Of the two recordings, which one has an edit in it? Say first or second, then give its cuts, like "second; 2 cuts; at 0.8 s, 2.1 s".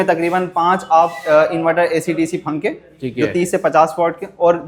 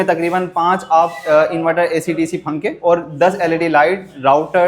second; 1 cut; at 2.8 s